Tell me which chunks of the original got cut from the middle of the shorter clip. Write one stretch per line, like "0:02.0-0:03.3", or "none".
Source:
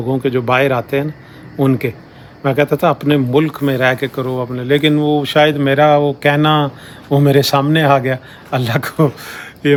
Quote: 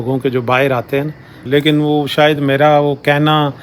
0:01.4-0:04.5